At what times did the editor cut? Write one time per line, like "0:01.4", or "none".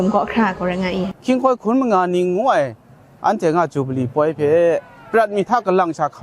0:01.1